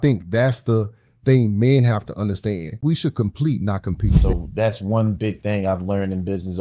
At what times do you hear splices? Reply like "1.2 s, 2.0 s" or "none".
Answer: 2.7 s, 4.1 s